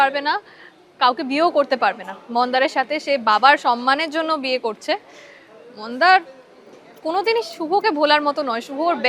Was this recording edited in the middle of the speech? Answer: no; 0 cuts

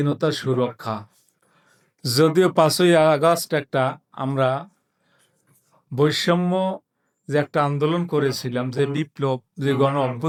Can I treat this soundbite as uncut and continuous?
yes; 0 cuts

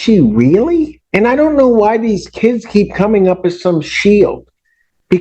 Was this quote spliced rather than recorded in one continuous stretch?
yes; 1 cut; at 1.0 s

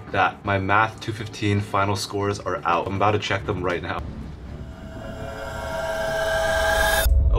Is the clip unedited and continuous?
no; 2 cuts; at 2.9 s, 4.0 s

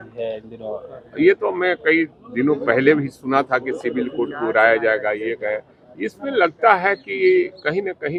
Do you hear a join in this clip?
no; 0 cuts

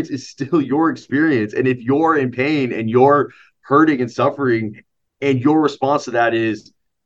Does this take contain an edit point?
no; 0 cuts

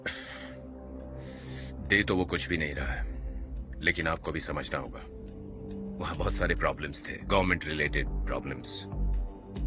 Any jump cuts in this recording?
no; 0 cuts

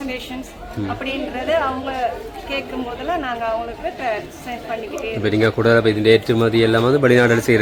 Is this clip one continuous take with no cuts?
yes; 0 cuts

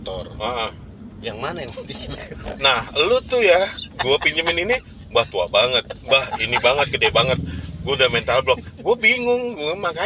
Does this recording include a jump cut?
no; 0 cuts

